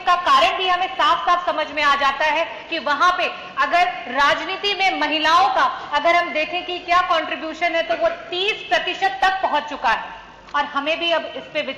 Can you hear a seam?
no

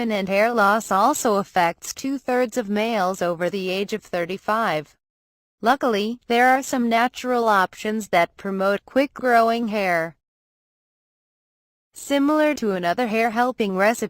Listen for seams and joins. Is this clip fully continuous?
no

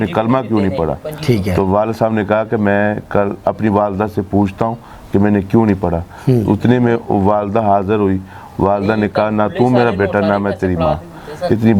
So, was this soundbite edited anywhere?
no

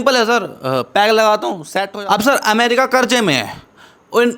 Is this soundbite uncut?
no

